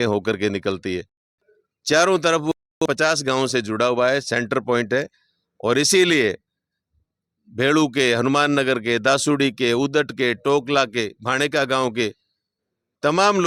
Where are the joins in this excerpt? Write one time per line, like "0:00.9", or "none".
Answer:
none